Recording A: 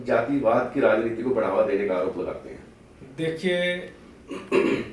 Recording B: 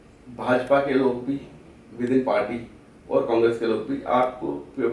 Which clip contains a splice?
A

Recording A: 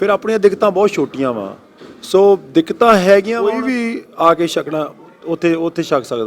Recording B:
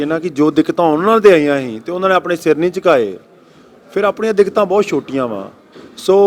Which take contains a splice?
A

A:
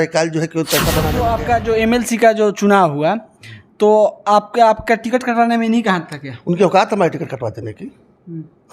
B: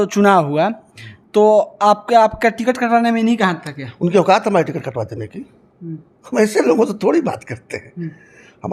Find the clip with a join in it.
A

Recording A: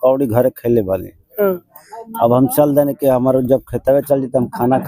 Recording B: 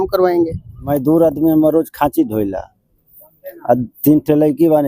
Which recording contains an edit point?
B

